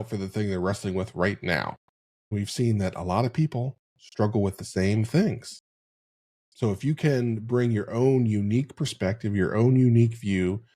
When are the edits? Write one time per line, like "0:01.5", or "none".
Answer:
0:02.3